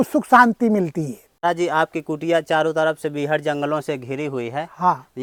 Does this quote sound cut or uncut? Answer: uncut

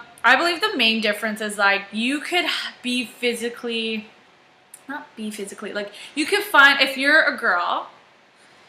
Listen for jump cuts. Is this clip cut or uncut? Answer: uncut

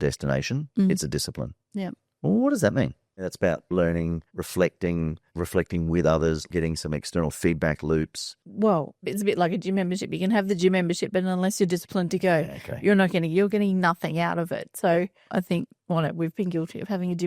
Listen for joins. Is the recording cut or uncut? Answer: cut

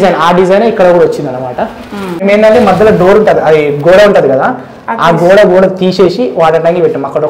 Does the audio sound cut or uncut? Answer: cut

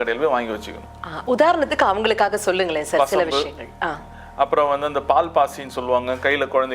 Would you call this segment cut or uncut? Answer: uncut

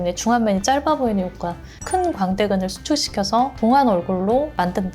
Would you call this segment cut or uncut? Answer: cut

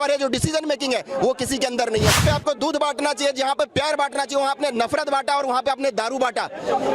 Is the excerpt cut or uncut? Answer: cut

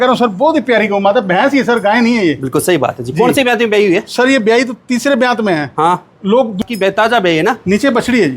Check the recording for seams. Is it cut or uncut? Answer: cut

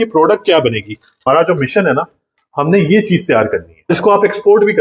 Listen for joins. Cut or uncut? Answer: cut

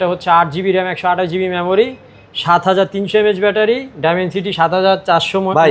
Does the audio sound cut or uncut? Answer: uncut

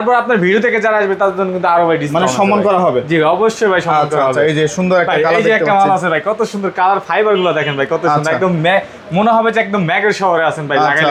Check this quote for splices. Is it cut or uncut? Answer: uncut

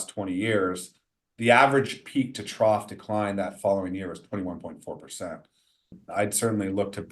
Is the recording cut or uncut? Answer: cut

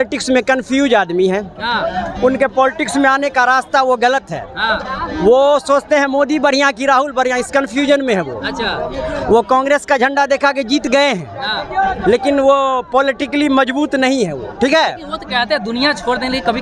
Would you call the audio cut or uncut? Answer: uncut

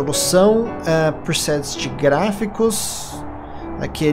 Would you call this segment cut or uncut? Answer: uncut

